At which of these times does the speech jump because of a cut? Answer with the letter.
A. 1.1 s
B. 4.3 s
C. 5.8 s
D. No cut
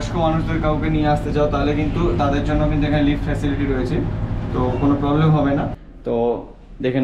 C